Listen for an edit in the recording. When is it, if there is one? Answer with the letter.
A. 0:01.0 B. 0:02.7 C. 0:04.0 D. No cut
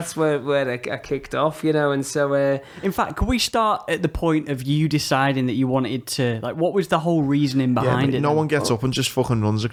D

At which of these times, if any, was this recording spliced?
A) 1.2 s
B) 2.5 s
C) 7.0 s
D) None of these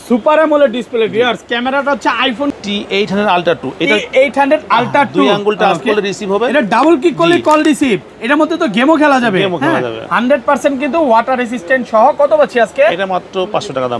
B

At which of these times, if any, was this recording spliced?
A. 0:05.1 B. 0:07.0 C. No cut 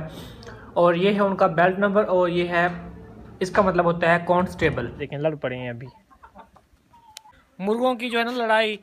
A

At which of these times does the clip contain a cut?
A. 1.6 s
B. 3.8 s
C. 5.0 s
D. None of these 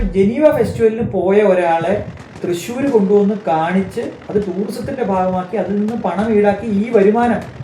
D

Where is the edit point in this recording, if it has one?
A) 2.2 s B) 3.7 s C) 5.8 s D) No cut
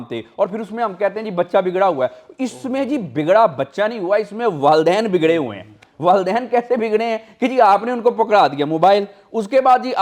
D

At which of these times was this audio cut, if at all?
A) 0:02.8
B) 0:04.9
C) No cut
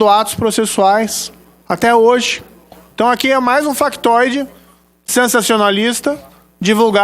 A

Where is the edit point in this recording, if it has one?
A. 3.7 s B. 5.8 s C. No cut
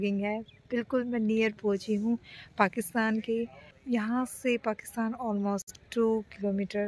A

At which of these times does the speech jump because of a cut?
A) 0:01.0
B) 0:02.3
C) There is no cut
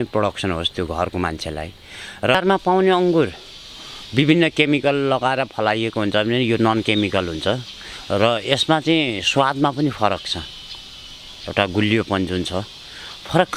B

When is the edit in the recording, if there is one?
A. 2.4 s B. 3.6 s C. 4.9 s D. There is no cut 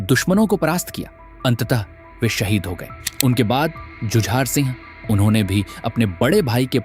C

